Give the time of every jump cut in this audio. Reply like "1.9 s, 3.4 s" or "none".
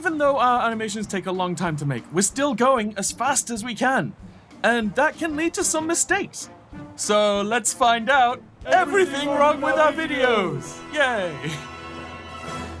none